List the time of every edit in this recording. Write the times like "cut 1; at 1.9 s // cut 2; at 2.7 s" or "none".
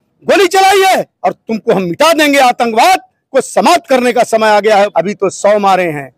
cut 1; at 1.1 s // cut 2; at 4.9 s